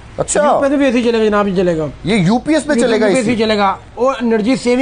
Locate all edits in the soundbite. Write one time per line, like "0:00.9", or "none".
none